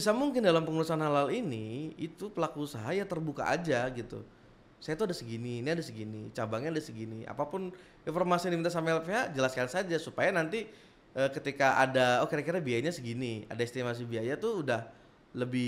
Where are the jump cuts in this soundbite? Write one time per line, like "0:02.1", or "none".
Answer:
none